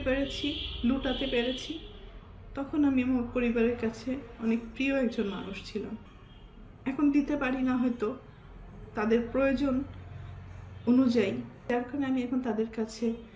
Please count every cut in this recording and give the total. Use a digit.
1